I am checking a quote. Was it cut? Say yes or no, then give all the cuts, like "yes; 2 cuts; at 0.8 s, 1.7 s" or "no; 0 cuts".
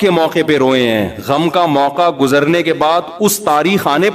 no; 0 cuts